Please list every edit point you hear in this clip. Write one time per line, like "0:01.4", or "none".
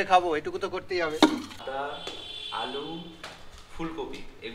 0:01.6